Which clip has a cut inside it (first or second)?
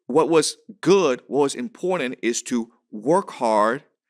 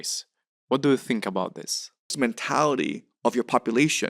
second